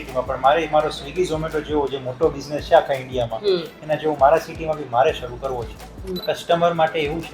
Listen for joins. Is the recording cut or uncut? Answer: cut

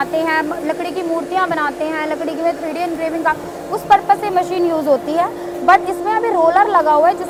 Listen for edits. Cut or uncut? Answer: uncut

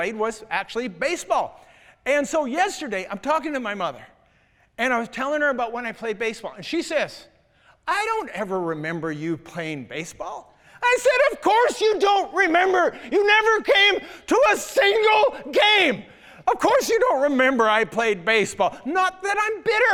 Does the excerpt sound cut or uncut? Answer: uncut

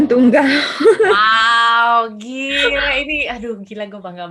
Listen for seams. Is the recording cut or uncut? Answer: uncut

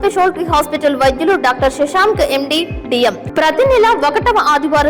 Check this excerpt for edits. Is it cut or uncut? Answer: cut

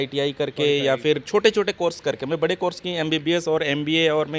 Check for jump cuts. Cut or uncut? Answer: uncut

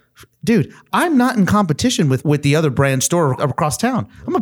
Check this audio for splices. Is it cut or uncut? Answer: cut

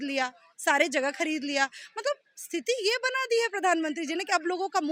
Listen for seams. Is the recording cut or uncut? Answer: uncut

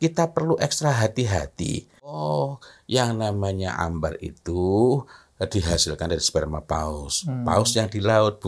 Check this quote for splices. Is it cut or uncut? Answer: cut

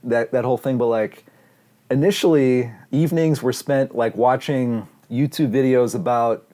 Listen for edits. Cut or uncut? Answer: cut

